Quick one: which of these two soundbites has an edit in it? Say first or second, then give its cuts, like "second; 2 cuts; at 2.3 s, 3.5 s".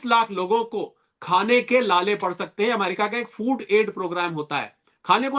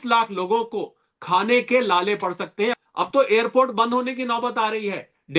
second; 1 cut; at 2.8 s